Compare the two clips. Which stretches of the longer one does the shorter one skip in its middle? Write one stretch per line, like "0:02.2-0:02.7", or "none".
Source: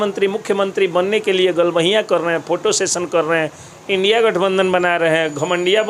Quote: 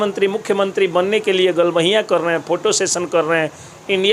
none